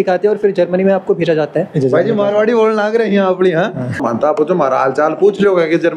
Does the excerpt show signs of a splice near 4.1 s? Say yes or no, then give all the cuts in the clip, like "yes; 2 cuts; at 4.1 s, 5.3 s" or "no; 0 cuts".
yes; 2 cuts; at 1.7 s, 4.1 s